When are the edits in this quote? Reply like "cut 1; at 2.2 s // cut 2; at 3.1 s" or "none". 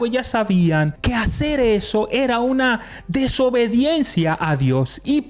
cut 1; at 1.0 s